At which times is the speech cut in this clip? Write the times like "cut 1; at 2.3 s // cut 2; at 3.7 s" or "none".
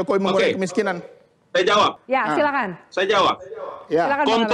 none

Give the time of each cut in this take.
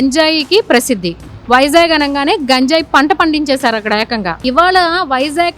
cut 1; at 4.4 s

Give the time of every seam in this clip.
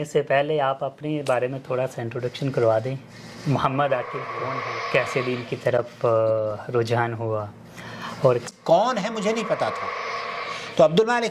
cut 1; at 4.5 s // cut 2; at 8.5 s

